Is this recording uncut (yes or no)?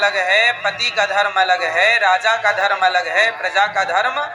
yes